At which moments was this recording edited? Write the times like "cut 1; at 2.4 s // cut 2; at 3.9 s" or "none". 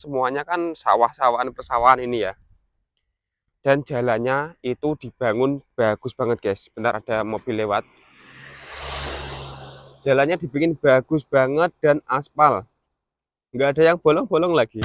none